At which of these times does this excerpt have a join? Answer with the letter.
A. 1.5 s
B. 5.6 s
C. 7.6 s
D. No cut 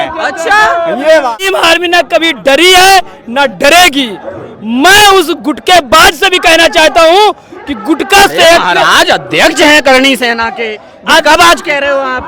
A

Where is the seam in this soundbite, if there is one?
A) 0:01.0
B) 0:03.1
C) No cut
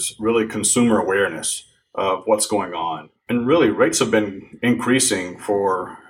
B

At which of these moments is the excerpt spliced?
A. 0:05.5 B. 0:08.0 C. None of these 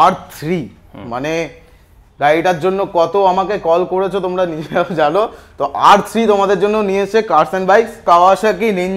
B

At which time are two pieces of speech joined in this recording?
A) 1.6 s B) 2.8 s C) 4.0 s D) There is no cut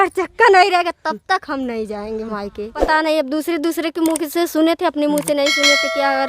B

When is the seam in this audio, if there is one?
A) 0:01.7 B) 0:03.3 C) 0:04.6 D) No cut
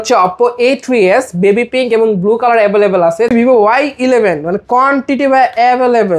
B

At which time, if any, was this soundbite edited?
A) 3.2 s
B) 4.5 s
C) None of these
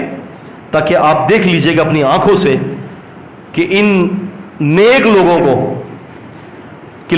C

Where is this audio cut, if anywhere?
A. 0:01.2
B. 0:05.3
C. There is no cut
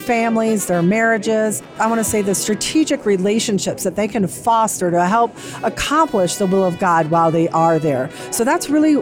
C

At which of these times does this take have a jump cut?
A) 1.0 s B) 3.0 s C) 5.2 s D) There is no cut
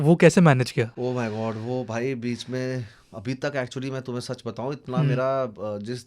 A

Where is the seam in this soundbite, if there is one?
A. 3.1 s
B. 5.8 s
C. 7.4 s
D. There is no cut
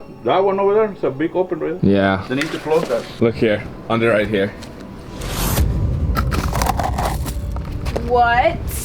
A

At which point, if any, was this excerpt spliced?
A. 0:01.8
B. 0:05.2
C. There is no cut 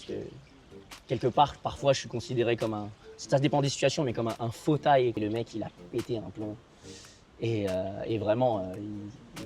B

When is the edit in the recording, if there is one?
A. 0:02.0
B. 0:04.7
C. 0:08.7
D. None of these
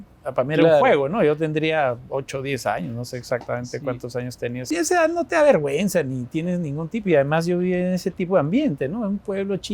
B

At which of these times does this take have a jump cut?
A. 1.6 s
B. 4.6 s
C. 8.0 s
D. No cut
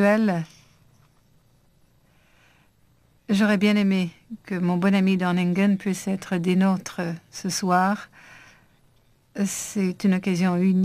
B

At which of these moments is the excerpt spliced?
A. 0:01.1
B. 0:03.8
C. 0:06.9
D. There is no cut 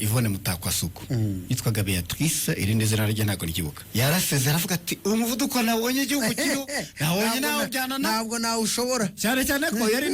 B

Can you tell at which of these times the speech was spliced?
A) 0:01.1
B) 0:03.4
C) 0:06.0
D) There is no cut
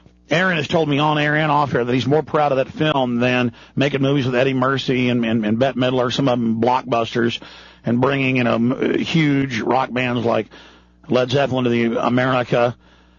D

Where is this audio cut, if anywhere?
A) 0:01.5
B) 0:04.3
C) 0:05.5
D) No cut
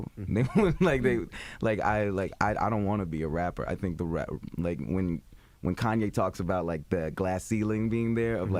D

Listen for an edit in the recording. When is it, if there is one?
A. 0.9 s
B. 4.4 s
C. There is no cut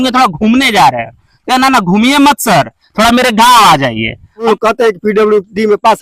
B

